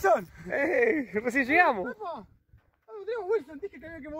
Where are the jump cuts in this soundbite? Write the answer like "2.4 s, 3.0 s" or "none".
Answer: none